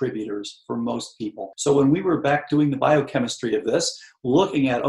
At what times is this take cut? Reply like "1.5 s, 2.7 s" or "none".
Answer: 1.5 s